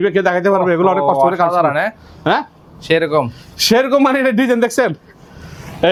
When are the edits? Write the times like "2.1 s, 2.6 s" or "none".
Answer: none